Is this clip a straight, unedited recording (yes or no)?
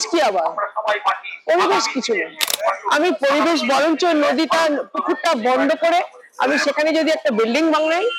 yes